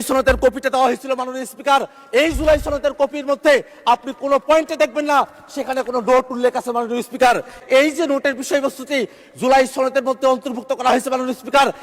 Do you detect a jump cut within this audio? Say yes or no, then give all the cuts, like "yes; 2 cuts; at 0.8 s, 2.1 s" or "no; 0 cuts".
yes; 1 cut; at 7.6 s